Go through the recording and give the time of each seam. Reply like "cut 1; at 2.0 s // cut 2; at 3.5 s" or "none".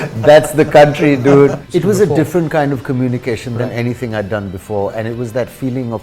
cut 1; at 1.6 s